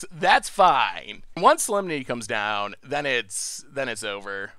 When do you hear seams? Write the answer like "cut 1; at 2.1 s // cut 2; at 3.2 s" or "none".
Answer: cut 1; at 1.2 s